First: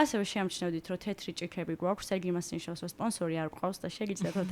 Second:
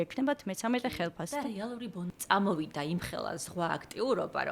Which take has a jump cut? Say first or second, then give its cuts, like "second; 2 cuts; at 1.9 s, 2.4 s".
second; 1 cut; at 2.2 s